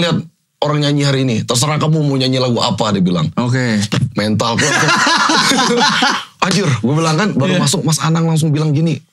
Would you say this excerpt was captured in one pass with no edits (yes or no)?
yes